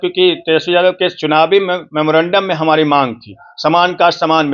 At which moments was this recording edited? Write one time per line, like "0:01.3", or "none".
none